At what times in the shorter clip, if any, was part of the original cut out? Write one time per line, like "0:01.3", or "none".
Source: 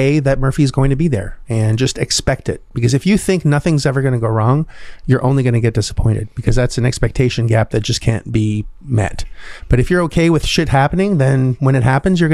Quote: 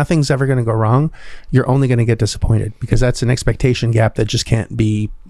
none